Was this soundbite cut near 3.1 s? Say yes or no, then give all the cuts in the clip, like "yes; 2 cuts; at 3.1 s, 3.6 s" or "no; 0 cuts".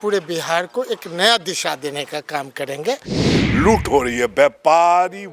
yes; 1 cut; at 3.1 s